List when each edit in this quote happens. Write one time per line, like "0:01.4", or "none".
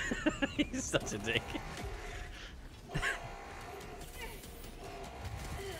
none